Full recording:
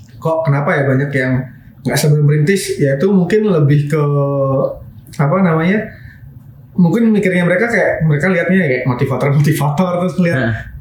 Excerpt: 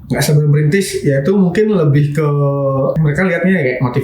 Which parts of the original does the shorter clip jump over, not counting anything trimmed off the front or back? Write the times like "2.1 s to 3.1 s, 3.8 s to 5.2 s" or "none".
4.7 s to 8.0 s